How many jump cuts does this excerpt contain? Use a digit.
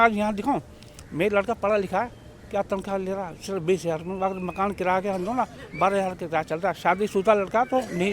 0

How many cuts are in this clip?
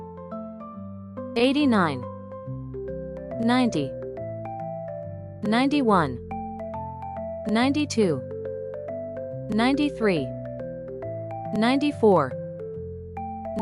4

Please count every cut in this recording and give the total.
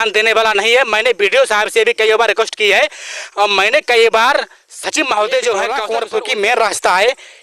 1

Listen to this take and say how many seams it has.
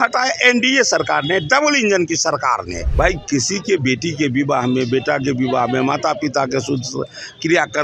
1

